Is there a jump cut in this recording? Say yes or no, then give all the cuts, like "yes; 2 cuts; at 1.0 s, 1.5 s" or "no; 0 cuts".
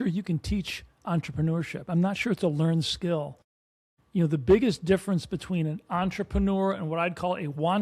no; 0 cuts